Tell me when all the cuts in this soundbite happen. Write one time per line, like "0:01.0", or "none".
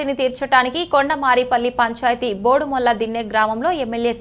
none